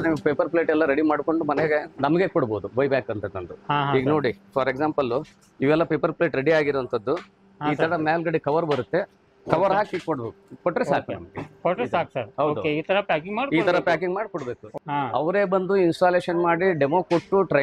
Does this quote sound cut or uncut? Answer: cut